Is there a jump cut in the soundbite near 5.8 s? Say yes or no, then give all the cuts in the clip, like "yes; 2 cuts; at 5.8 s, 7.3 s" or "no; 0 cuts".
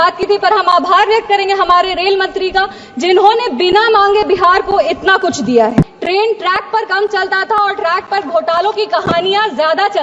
yes; 1 cut; at 5.8 s